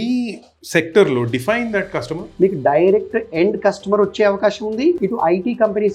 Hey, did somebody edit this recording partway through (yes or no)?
yes